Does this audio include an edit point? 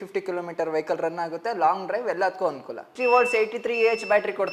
yes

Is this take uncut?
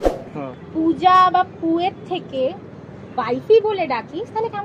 yes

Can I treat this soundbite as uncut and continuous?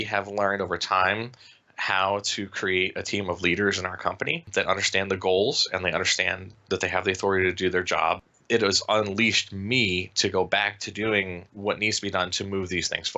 no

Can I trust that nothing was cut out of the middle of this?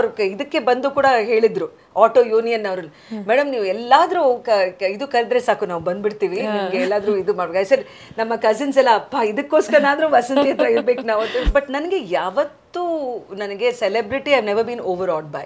no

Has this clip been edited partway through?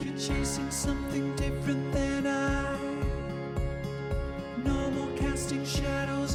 no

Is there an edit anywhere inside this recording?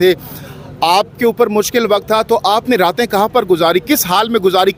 no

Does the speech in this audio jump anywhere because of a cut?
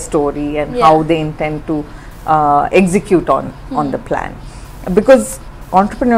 no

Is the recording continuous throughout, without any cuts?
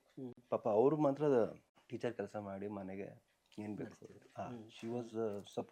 yes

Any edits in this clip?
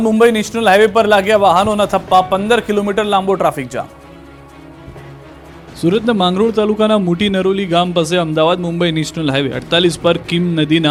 no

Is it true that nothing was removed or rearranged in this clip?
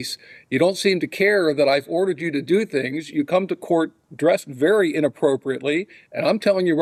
yes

